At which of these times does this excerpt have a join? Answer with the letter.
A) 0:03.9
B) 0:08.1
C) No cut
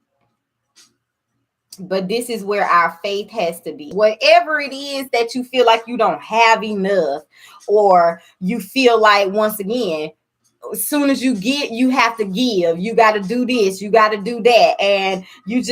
A